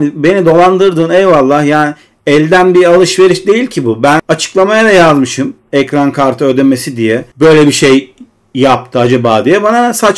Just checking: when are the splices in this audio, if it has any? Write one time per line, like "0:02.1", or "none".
0:04.2
0:07.3